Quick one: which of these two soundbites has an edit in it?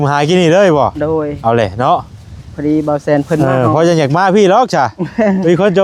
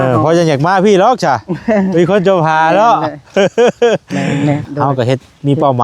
second; 1 cut; at 4.7 s

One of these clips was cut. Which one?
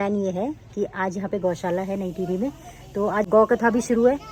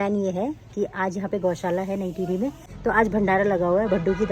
second; 1 cut; at 2.7 s

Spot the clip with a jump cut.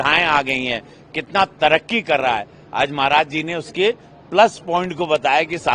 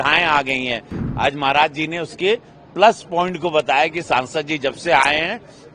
second; 1 cut; at 1.0 s

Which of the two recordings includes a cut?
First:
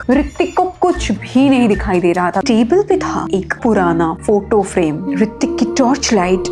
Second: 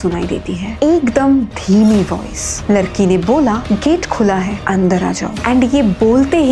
first; 1 cut; at 2.4 s

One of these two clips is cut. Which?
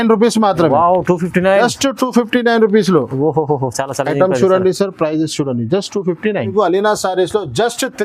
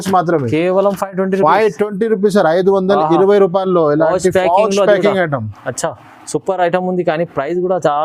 first; 1 cut; at 6.5 s

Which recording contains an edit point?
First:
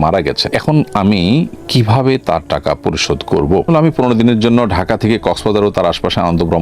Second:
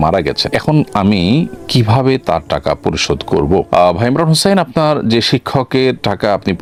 first; 1 cut; at 3.7 s

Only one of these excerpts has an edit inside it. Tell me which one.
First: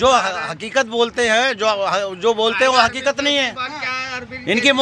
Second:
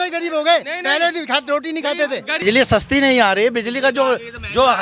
second; 1 cut; at 2.4 s

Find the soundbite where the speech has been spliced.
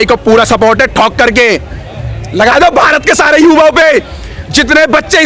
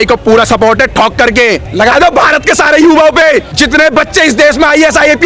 second; 2 cuts; at 1.7 s, 3.5 s

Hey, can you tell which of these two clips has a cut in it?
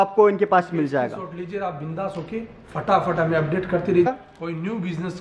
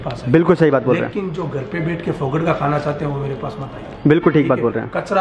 first; 1 cut; at 4.1 s

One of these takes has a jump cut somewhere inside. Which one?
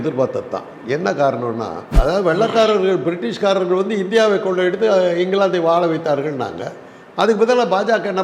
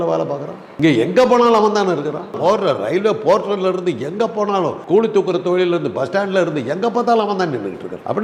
first; 1 cut; at 1.9 s

